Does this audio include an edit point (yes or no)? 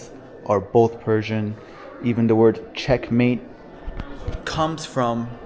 no